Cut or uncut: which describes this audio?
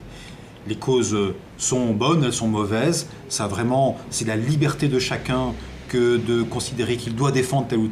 cut